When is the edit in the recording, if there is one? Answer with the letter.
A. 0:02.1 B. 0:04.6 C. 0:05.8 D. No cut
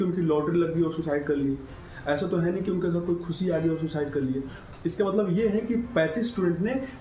B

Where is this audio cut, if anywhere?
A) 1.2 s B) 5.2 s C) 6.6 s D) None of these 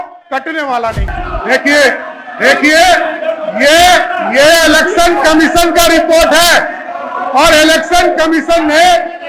A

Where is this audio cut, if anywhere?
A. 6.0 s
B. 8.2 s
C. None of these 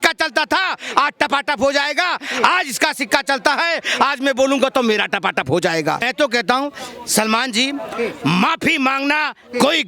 A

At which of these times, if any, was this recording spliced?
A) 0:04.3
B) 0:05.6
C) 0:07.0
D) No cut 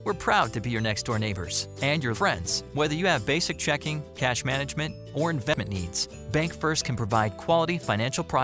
B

